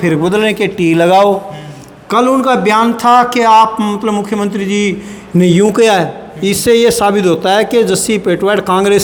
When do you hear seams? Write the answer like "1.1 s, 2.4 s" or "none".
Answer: none